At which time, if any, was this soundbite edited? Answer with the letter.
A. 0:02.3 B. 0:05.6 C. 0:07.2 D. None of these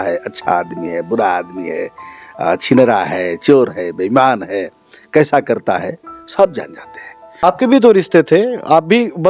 C